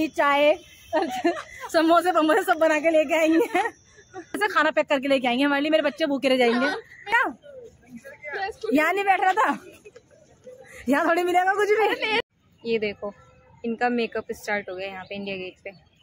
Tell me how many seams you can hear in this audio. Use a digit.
3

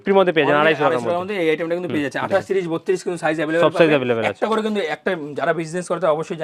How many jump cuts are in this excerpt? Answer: 0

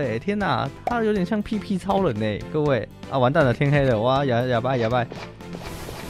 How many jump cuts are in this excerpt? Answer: 1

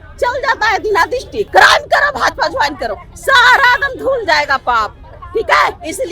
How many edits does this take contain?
1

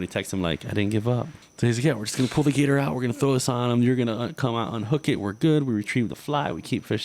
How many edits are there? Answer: 1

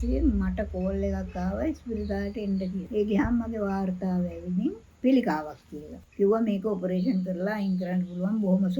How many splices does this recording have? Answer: 1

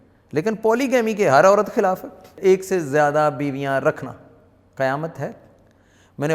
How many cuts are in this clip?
1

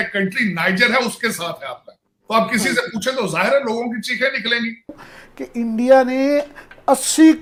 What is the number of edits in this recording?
0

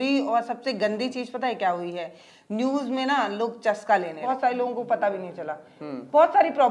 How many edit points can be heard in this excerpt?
1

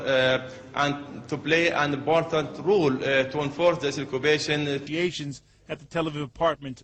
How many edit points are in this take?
0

